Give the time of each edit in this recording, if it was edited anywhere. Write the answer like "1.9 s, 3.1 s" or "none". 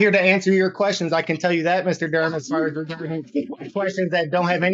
none

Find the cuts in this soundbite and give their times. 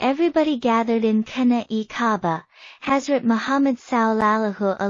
2.7 s

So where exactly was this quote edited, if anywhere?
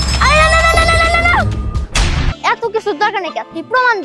2.3 s

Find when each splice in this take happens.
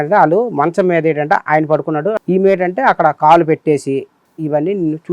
2.1 s

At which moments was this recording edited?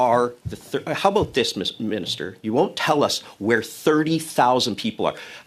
none

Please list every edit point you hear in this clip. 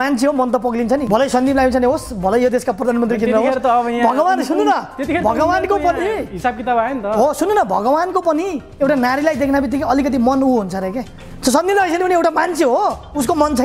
1.0 s

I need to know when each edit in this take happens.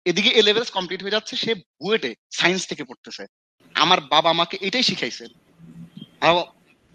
3.6 s

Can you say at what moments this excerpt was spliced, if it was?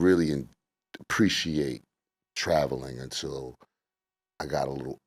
none

